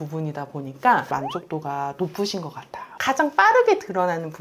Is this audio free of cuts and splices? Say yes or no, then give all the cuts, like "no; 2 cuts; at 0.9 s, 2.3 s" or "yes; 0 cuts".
no; 2 cuts; at 1.1 s, 2.9 s